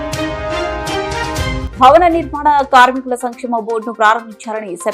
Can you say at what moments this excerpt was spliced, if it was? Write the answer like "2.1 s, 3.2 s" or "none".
1.6 s